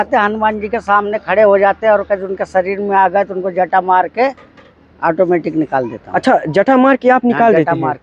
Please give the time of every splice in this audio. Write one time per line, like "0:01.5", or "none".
none